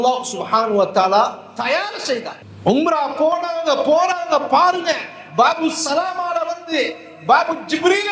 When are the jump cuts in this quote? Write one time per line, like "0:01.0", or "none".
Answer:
0:02.4